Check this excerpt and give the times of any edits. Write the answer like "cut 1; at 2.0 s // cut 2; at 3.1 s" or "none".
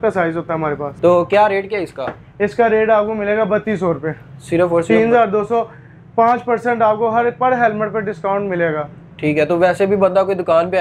none